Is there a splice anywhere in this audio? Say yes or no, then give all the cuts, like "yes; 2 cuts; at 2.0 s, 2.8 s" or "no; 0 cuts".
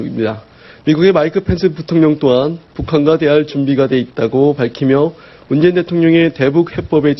yes; 1 cut; at 1.6 s